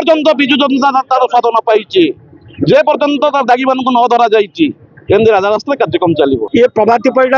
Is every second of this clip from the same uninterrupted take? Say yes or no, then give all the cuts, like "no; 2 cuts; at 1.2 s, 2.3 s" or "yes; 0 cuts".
no; 1 cut; at 6.4 s